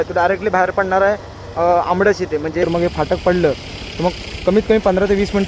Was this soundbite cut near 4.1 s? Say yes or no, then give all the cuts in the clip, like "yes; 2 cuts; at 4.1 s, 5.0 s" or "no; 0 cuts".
no; 1 cut; at 2.6 s